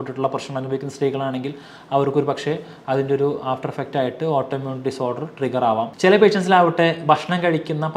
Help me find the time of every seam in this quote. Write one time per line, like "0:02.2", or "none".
0:05.9